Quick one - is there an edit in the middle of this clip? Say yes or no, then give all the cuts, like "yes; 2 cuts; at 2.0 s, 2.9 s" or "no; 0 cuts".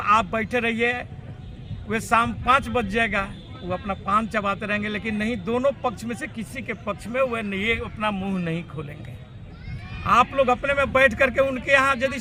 no; 0 cuts